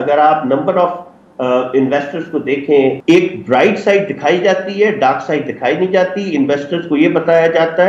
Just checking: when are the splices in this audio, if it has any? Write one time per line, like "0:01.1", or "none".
0:03.0